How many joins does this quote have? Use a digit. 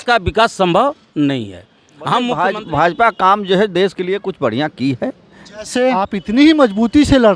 2